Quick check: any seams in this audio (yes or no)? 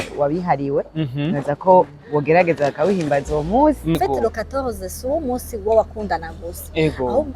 yes